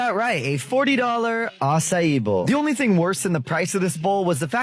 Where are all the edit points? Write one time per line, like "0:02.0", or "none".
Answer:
none